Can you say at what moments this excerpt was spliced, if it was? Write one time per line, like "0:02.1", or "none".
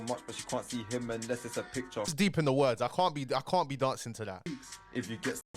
0:02.1